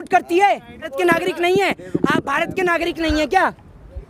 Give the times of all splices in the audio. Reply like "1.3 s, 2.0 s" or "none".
0.9 s